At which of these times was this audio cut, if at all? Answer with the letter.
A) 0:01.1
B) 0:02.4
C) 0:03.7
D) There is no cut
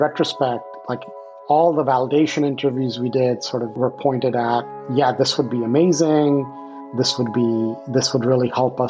C